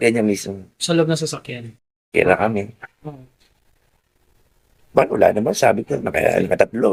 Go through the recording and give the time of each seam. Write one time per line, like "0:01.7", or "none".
none